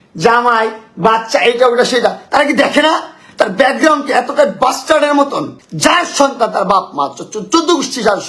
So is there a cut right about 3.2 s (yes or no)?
no